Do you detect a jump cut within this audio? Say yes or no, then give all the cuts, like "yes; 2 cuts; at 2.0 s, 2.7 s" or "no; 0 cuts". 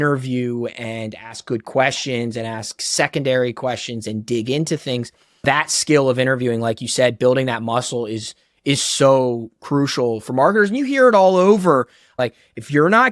yes; 2 cuts; at 5.4 s, 12.1 s